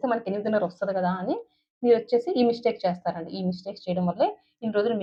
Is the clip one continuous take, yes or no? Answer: yes